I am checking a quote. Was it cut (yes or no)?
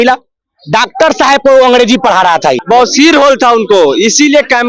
yes